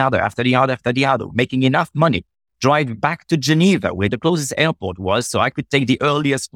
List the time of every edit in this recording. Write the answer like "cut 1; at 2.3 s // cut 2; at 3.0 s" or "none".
cut 1; at 4.1 s